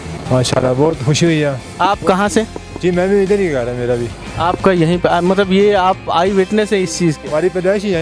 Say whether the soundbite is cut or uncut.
uncut